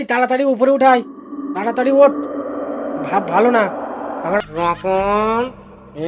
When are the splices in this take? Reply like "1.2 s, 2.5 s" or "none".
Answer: 4.4 s